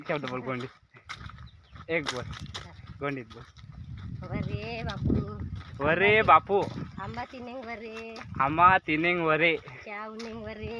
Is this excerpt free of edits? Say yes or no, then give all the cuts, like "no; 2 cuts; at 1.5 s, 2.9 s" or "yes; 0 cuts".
yes; 0 cuts